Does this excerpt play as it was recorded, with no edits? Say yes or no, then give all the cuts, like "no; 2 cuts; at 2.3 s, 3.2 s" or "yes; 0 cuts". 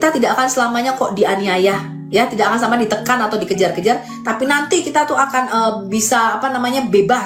yes; 0 cuts